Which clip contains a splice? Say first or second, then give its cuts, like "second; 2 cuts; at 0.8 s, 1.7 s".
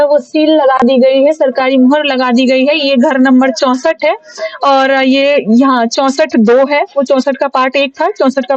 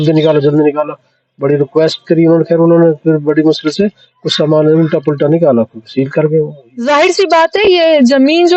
second; 1 cut; at 6.9 s